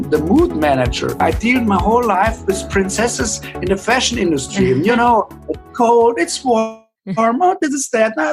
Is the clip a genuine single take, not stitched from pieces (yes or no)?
no